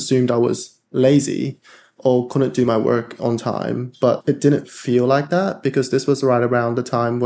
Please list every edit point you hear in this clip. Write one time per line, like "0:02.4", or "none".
none